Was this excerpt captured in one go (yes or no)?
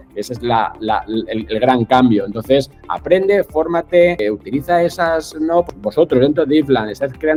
yes